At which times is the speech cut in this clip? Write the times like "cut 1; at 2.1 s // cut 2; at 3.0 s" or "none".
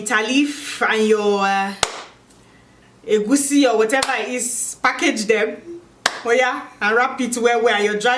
none